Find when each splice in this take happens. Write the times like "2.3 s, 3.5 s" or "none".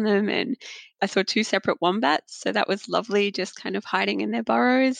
0.9 s